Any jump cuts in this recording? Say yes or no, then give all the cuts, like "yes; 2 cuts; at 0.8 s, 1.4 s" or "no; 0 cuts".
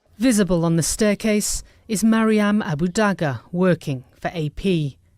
yes; 1 cut; at 0.9 s